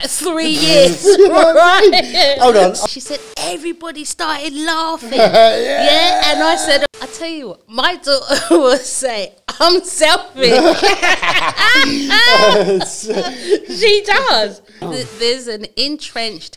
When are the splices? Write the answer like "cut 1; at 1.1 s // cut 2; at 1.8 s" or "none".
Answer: cut 1; at 2.8 s // cut 2; at 6.9 s // cut 3; at 14.8 s